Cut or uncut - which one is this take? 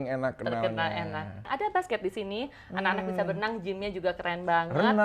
cut